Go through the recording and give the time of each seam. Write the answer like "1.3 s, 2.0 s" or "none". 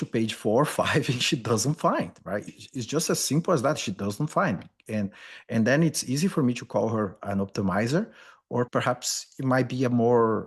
none